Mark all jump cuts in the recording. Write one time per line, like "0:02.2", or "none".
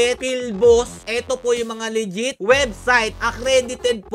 0:01.0